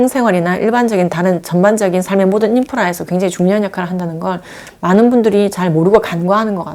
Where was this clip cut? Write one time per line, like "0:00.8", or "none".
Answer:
none